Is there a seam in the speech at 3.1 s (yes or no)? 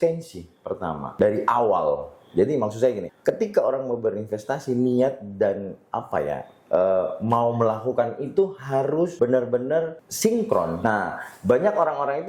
yes